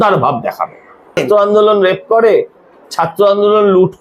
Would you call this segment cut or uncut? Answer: cut